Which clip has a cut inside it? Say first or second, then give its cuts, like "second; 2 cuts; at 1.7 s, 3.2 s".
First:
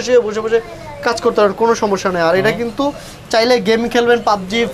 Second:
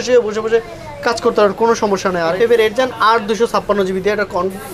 second; 1 cut; at 2.3 s